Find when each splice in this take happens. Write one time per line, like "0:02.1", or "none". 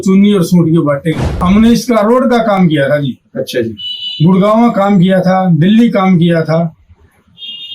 0:01.4